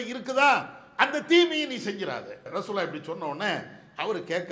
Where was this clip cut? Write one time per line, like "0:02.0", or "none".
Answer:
0:02.5